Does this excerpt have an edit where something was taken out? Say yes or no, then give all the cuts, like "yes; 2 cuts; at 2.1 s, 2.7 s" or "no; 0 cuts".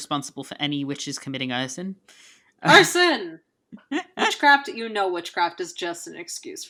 no; 0 cuts